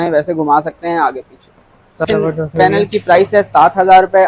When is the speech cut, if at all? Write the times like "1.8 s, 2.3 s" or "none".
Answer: 2.0 s